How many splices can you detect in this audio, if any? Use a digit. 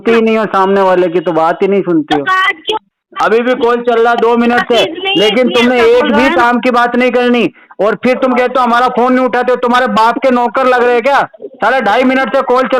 1